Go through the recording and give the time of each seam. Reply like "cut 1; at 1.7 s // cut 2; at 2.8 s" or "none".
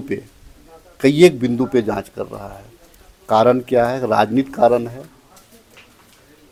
none